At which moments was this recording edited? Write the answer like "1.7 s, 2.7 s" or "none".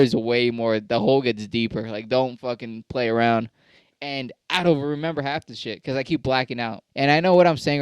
6.8 s